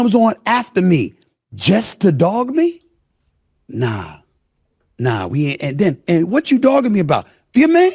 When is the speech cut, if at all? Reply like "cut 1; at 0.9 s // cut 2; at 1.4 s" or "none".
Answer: none